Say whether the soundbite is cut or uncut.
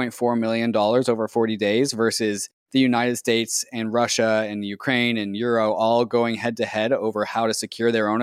uncut